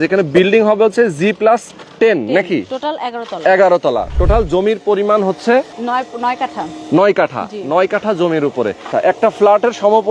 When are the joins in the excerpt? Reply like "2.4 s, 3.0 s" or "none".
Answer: 1.8 s, 5.8 s, 8.9 s